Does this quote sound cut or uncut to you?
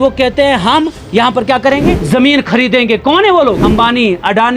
cut